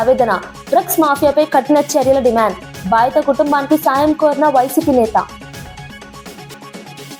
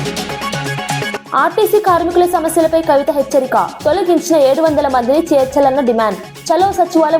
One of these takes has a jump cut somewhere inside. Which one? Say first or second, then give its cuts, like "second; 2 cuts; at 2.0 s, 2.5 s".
second; 1 cut; at 1.2 s